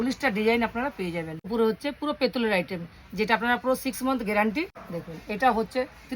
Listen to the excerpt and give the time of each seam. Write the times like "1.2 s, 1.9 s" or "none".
1.5 s, 4.8 s